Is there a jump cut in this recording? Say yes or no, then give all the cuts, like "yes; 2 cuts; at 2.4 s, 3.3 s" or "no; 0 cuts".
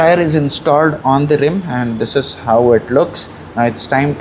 no; 0 cuts